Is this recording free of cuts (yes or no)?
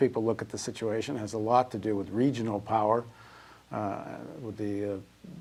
yes